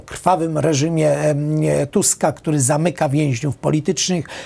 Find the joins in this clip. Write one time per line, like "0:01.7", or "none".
none